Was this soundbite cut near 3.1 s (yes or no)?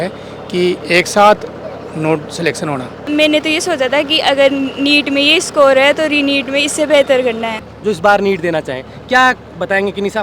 yes